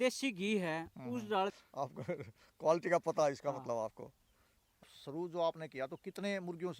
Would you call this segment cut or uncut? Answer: cut